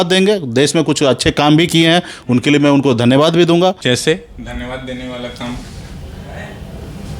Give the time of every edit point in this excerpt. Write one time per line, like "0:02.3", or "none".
0:03.8